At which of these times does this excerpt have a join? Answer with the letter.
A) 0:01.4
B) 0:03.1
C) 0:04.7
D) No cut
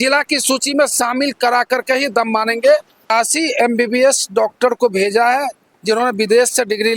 B